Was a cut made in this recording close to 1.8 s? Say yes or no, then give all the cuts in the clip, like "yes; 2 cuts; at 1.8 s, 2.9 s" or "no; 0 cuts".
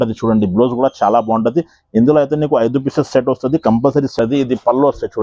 no; 1 cut; at 4.1 s